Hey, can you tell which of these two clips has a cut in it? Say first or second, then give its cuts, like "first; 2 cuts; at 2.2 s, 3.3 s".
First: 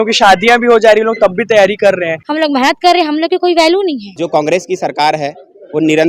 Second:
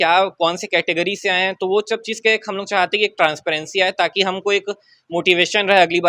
first; 2 cuts; at 2.2 s, 4.1 s